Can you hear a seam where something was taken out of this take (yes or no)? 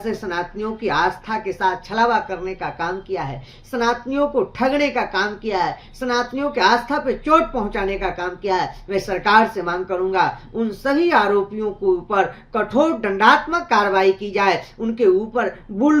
no